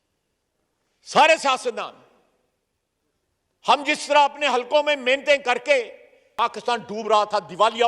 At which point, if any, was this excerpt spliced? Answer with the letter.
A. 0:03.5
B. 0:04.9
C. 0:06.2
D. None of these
C